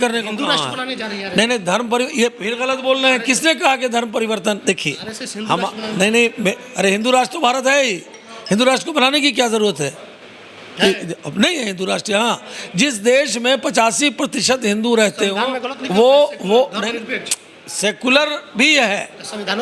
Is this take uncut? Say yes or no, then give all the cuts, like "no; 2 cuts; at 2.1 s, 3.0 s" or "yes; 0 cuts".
yes; 0 cuts